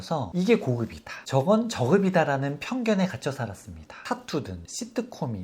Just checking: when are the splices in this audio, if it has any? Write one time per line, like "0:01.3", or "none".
0:03.9